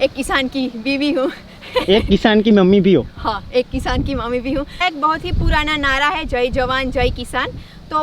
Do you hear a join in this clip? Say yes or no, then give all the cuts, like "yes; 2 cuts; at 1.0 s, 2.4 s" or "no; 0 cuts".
yes; 1 cut; at 4.8 s